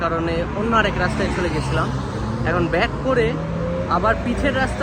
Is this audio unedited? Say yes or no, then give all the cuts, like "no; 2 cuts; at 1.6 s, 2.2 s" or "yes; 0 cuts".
yes; 0 cuts